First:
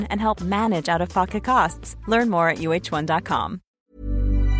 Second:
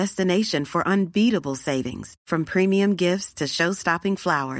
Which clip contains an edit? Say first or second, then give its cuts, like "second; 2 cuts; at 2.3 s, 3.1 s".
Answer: first; 1 cut; at 3.6 s